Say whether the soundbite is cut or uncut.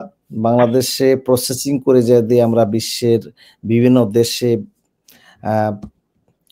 uncut